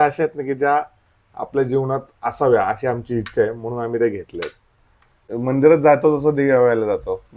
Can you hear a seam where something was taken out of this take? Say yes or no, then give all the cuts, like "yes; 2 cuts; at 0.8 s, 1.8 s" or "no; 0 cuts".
yes; 1 cut; at 5.2 s